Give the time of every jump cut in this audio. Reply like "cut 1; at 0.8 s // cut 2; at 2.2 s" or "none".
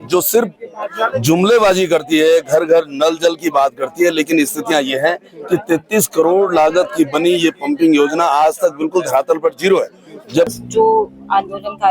cut 1; at 10.5 s

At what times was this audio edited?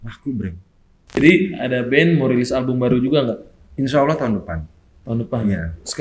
cut 1; at 1.2 s

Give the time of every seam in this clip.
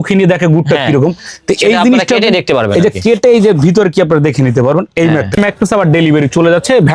cut 1; at 5.4 s

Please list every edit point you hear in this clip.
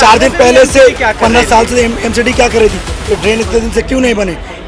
none

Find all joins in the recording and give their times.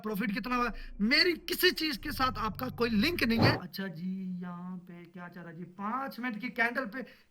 cut 1; at 3.6 s

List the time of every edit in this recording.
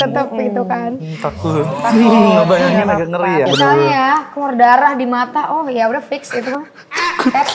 cut 1; at 3.5 s

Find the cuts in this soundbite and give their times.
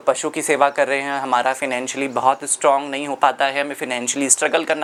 none

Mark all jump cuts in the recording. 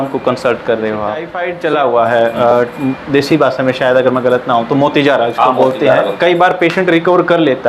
cut 1; at 1.4 s

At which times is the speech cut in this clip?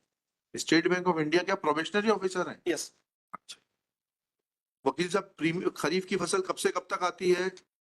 cut 1; at 4.4 s

